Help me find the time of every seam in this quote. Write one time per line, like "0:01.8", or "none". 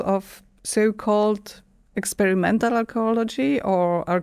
none